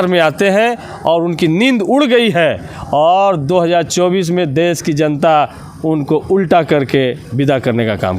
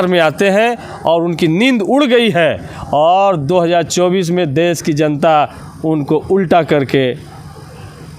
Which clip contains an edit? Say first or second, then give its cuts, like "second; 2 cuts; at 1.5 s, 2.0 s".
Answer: first; 1 cut; at 7.2 s